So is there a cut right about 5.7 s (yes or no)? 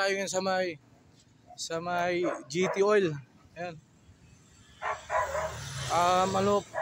no